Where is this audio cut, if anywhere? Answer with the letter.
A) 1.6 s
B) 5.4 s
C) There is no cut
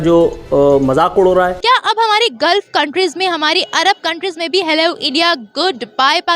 A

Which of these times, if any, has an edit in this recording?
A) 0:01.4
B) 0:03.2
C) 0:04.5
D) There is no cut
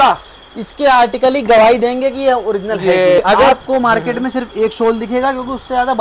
B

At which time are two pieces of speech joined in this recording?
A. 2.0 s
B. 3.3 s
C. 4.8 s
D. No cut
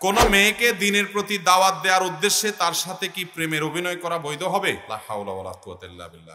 C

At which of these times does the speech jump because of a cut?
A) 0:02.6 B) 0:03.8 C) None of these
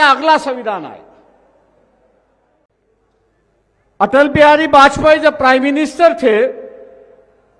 A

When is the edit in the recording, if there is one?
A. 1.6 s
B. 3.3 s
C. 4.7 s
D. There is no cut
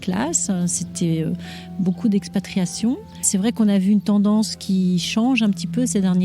B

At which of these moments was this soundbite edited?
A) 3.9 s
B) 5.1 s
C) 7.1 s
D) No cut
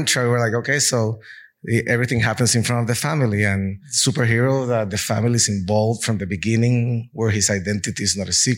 A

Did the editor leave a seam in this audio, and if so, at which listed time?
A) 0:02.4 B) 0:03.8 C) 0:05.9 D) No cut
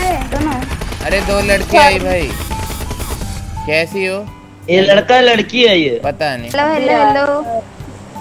D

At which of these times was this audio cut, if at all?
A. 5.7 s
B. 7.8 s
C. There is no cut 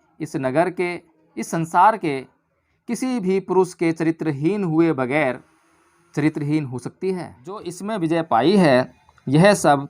B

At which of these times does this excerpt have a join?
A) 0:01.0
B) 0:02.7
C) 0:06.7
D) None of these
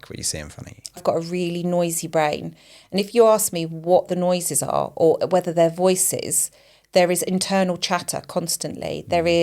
A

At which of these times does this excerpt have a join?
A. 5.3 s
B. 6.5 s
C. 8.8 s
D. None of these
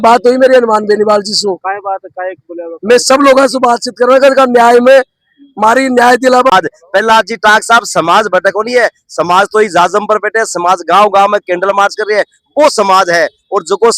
B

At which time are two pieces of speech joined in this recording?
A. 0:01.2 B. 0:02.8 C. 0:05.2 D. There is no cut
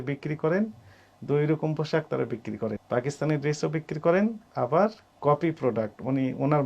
B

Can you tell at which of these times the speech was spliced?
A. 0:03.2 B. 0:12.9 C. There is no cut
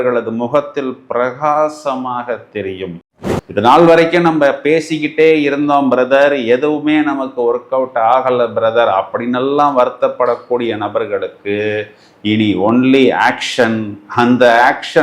A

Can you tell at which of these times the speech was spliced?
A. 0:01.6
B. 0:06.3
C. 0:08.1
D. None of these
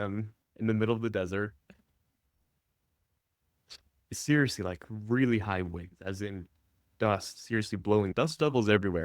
C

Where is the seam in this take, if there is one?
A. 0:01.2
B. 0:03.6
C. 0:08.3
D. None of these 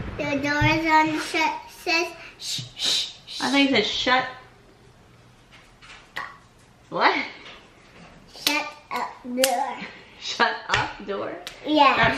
D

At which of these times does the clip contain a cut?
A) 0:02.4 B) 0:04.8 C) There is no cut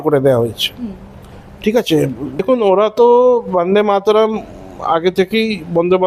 A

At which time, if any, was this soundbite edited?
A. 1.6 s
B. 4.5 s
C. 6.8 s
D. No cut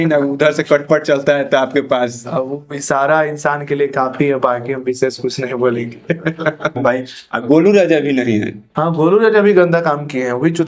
C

